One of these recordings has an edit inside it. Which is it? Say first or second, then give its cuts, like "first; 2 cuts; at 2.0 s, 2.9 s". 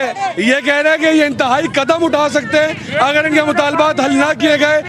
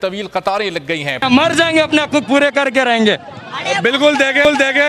second; 1 cut; at 1.2 s